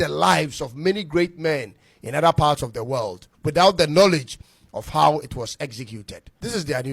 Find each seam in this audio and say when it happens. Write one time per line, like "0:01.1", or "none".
none